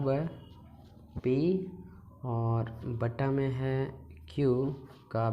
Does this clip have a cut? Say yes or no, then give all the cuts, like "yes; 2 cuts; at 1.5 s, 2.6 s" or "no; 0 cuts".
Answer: no; 0 cuts